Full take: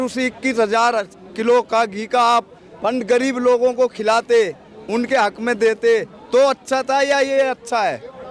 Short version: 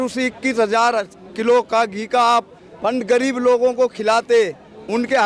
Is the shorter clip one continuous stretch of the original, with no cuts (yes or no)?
yes